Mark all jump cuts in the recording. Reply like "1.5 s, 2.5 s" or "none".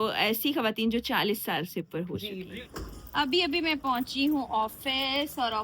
2.4 s